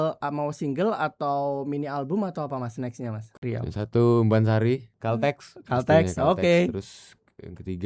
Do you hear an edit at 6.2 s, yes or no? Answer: no